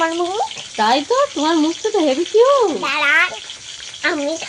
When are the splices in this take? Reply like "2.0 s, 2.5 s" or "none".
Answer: 3.0 s